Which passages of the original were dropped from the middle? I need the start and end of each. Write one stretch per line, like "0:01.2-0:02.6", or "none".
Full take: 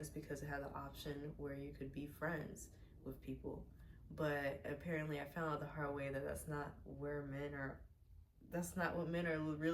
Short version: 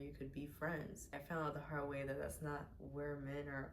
0:02.8-0:05.3